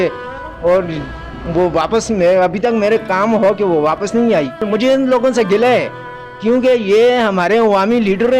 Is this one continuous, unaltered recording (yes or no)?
no